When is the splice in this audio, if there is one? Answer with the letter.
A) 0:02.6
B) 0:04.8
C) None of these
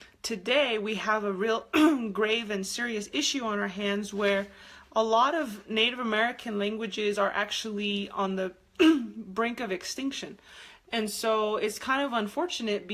C